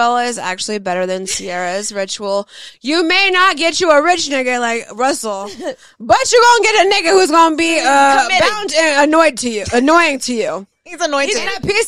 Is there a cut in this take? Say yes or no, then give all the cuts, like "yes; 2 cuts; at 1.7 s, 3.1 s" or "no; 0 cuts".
no; 0 cuts